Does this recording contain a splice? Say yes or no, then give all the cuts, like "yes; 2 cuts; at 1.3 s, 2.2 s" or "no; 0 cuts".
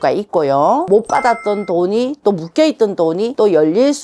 no; 0 cuts